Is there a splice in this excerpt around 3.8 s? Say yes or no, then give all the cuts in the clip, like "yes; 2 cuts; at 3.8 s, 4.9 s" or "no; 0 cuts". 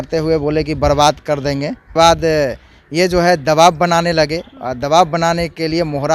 no; 1 cut; at 1.9 s